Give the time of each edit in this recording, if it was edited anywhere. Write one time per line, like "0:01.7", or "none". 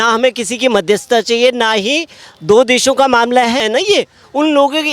0:03.6

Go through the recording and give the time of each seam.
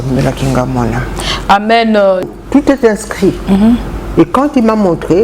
0:02.3

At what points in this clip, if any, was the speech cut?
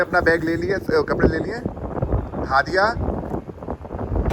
none

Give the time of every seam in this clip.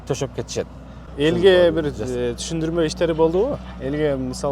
0:01.0

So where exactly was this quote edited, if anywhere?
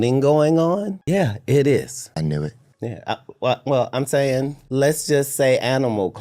0:00.9
0:02.0
0:04.6

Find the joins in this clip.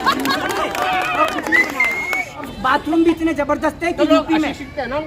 0:02.5

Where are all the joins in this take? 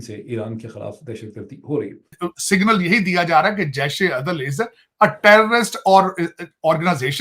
0:02.1

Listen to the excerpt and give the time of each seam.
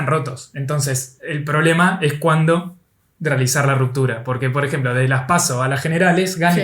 none

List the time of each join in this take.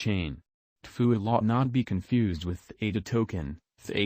0:03.0

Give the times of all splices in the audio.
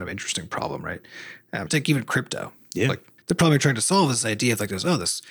0:01.7
0:03.1

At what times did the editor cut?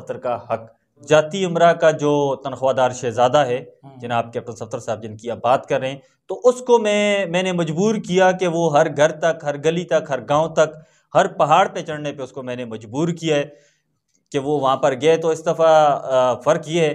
0:01.0

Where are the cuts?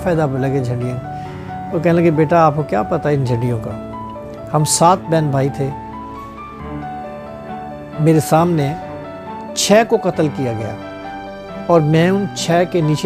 none

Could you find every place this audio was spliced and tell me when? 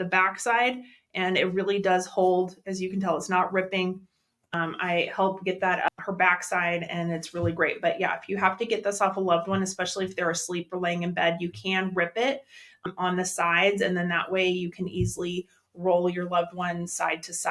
0:04.5
0:05.9
0:12.9

